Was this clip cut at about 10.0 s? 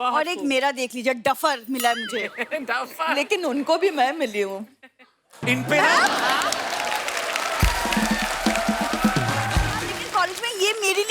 yes; 1 cut; at 10.0 s

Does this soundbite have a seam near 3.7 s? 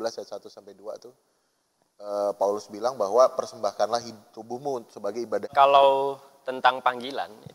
no; 1 cut; at 5.5 s

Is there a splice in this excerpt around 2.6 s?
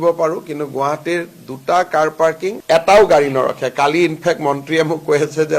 yes; 1 cut; at 2.6 s

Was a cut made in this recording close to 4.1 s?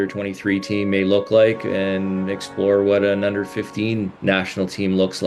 yes; 1 cut; at 4.1 s

